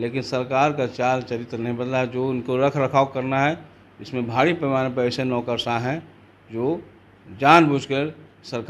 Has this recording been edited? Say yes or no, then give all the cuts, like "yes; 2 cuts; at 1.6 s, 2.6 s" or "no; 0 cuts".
no; 0 cuts